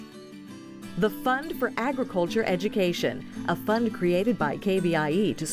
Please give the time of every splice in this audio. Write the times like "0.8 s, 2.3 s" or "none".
1.0 s